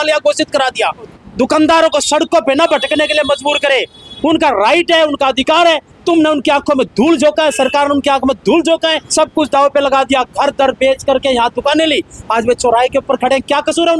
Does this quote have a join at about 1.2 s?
yes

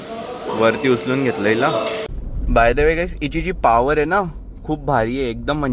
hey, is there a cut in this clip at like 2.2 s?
yes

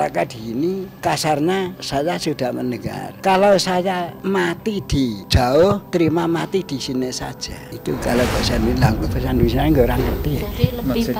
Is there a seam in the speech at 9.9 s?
no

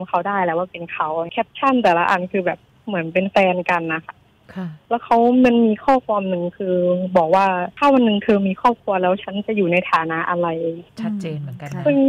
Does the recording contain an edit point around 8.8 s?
no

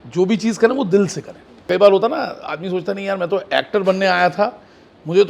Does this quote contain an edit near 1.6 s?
yes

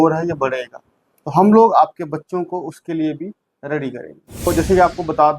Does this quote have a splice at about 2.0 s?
no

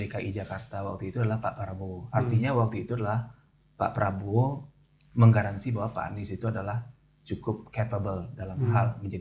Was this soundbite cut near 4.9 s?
no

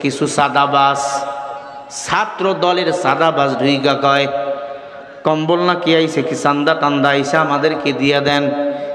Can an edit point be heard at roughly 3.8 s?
no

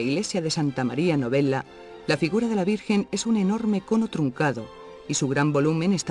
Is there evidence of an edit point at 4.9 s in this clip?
no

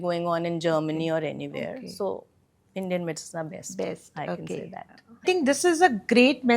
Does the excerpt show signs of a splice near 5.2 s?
yes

